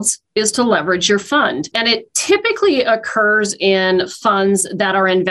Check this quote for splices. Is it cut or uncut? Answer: cut